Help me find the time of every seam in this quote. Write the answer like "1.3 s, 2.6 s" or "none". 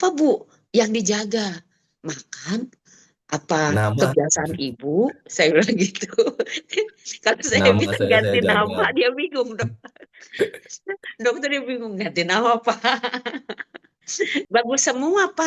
14.4 s